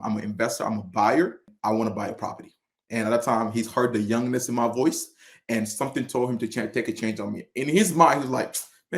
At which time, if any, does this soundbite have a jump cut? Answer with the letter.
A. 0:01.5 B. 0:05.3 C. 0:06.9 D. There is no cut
A